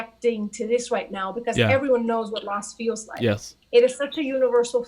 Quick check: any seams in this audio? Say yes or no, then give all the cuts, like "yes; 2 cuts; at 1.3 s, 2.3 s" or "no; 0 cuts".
yes; 1 cut; at 3.5 s